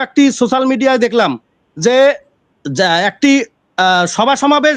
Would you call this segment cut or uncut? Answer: uncut